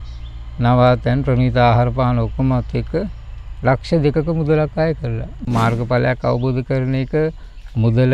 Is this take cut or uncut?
cut